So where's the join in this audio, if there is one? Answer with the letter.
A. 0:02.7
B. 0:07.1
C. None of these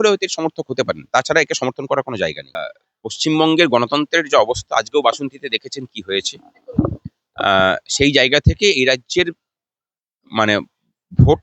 A